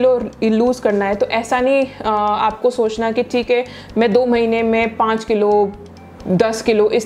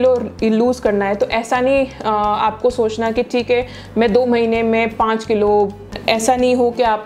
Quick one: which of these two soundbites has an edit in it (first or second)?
second